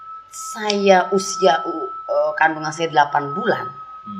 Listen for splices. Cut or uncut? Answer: uncut